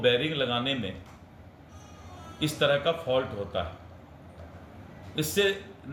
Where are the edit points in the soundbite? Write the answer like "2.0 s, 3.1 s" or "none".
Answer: none